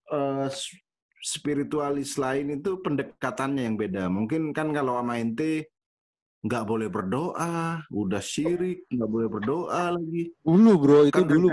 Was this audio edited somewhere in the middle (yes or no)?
no